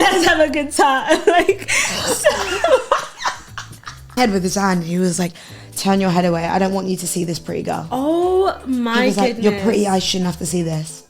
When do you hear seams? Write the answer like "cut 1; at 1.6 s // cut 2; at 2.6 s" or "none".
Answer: cut 1; at 4.2 s